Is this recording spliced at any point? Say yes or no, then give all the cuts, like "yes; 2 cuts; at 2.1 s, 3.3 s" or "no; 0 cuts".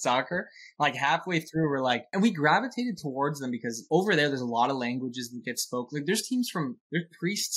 yes; 2 cuts; at 2.0 s, 3.7 s